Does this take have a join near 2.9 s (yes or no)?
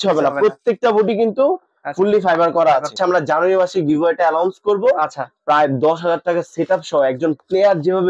yes